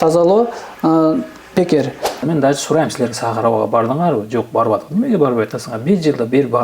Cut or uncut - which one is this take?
cut